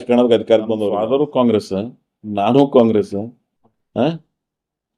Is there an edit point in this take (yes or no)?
yes